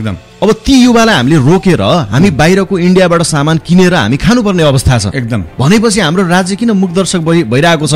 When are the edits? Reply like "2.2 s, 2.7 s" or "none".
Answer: none